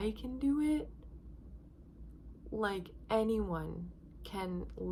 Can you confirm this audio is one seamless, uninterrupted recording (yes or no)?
yes